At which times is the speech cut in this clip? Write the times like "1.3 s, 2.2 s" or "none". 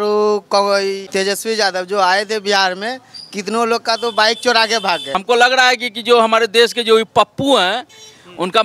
1.0 s, 5.2 s